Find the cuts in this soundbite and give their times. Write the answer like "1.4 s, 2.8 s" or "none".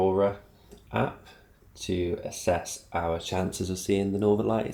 none